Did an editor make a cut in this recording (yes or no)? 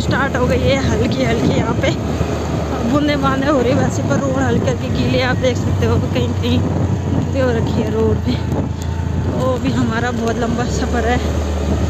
no